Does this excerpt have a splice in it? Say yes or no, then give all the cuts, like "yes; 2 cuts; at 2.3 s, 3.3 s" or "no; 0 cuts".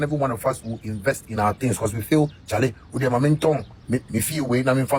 no; 0 cuts